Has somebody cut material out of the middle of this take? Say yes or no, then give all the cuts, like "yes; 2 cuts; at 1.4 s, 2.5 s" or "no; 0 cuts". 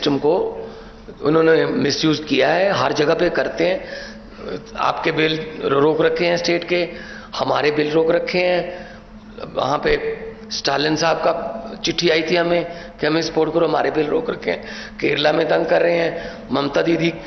no; 0 cuts